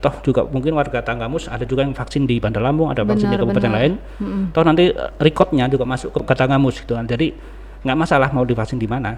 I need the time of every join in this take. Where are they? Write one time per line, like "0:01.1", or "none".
0:06.2